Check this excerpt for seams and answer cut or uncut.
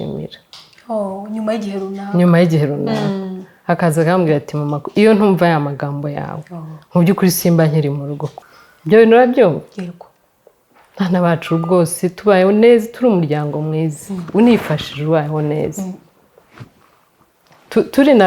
cut